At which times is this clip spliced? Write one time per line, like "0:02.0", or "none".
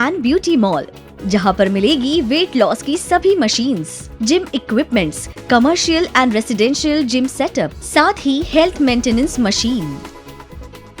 0:00.9